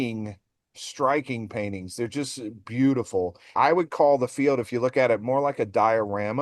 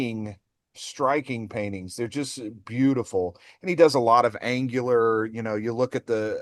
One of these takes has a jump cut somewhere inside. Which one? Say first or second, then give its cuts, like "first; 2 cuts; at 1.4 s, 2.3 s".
first; 1 cut; at 3.5 s